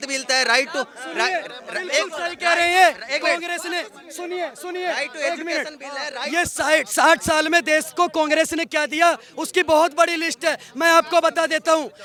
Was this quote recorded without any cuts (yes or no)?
yes